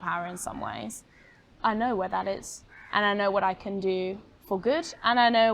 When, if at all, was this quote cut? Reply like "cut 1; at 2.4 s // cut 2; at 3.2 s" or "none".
cut 1; at 1.6 s